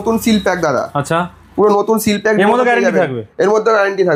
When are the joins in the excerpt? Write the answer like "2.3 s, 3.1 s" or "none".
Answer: none

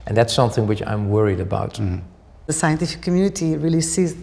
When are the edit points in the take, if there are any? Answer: none

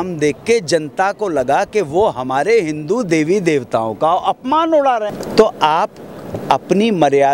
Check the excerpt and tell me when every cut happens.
5.1 s

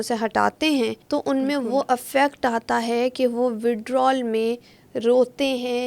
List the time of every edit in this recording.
1.0 s

